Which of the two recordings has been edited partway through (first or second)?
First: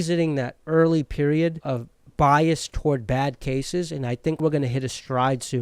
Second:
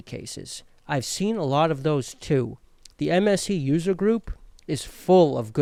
first